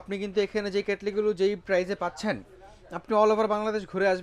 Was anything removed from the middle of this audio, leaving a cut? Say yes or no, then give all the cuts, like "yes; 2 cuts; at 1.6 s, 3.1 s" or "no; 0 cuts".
no; 0 cuts